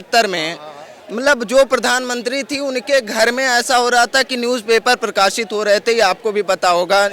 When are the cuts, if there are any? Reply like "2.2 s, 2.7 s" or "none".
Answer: none